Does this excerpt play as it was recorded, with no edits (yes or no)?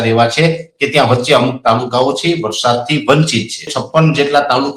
no